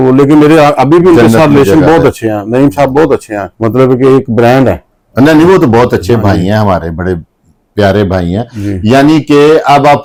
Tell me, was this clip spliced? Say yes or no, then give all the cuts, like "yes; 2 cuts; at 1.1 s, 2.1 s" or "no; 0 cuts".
no; 0 cuts